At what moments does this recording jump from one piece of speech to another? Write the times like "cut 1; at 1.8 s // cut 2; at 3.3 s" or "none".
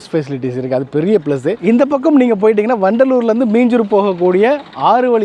cut 1; at 1.6 s